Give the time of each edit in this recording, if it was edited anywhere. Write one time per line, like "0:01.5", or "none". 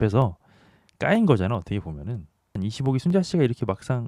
0:02.6